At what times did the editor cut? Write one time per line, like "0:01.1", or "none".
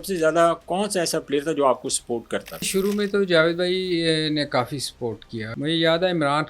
0:02.7
0:05.5